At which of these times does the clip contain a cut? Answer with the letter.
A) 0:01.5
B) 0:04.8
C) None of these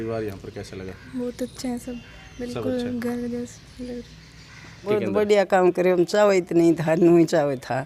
B